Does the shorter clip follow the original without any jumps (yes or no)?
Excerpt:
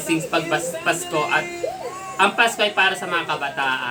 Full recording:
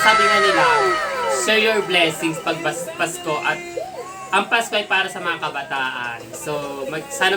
yes